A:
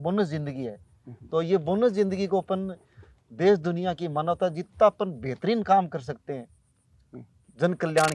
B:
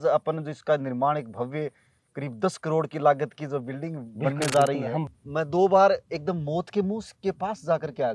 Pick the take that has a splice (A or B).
B